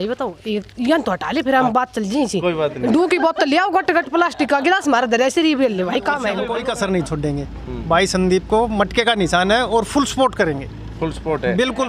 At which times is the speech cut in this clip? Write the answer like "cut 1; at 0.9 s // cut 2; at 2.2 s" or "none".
cut 1; at 6.4 s